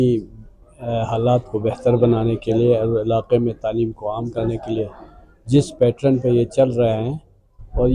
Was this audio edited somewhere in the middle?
no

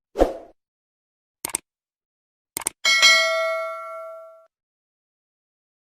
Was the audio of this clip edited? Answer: yes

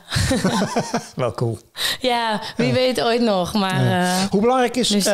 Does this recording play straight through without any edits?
yes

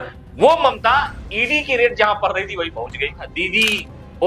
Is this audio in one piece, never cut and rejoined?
no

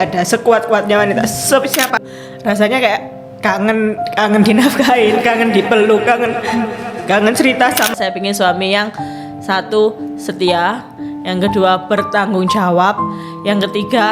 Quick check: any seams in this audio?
yes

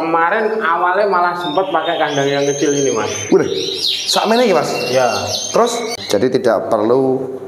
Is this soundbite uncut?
no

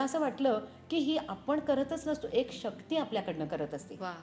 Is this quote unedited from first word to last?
yes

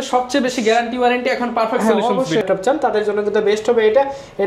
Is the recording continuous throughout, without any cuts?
no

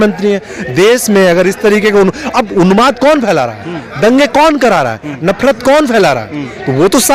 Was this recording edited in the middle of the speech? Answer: no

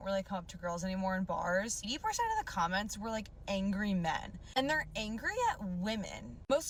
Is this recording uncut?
yes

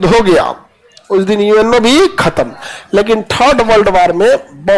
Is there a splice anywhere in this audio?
no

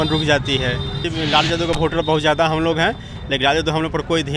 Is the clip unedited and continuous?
no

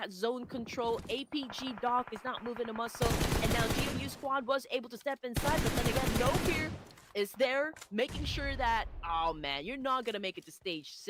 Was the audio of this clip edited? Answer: no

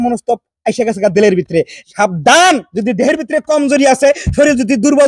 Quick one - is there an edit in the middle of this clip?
yes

